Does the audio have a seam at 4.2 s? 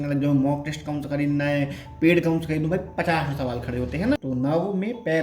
yes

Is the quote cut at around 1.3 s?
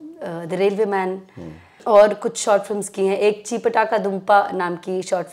no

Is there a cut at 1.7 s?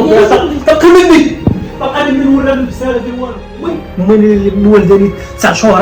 no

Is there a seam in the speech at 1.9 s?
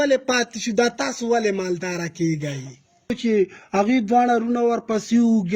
no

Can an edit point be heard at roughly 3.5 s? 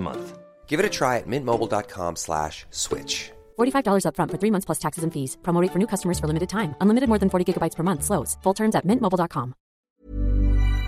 no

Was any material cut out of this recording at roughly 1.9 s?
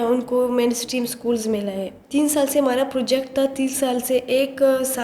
yes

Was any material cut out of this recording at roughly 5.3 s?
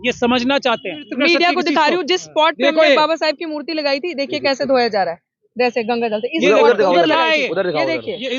no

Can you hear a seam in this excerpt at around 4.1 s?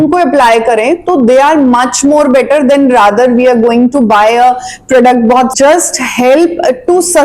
no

